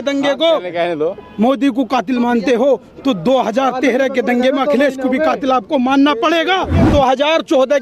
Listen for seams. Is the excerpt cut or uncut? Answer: cut